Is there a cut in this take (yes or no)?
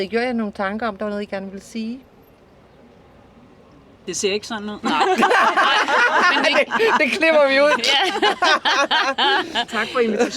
yes